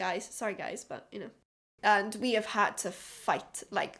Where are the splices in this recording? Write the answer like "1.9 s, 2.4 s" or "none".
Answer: 1.7 s